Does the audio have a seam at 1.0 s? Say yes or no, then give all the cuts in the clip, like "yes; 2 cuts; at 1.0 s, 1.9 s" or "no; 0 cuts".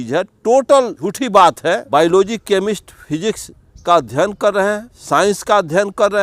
yes; 3 cuts; at 1.0 s, 1.8 s, 4.9 s